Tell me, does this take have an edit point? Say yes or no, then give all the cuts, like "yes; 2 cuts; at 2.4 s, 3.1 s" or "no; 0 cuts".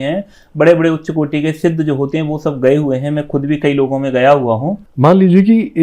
yes; 1 cut; at 4.8 s